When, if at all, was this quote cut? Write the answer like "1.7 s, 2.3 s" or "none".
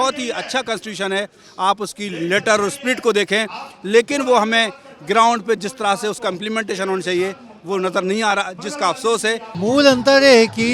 9.5 s